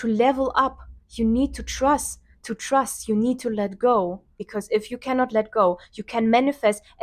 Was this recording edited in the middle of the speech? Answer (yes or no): yes